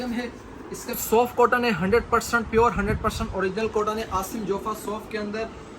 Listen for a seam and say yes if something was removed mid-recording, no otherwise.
yes